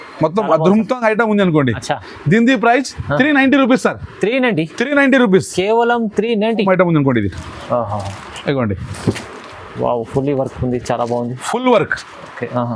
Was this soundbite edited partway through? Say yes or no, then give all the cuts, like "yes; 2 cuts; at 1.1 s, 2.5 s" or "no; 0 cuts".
yes; 1 cut; at 6.6 s